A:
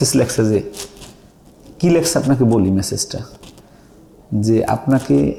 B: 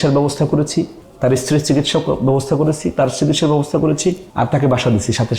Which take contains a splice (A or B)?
B